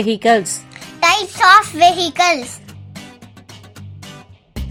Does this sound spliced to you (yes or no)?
no